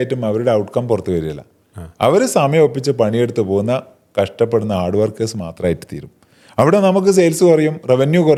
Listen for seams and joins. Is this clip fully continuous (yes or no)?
yes